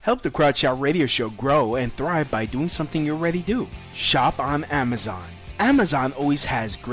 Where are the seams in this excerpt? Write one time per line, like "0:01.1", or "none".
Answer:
0:01.2